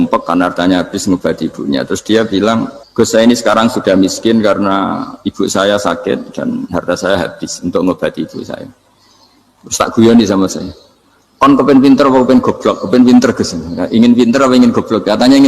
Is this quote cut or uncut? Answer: cut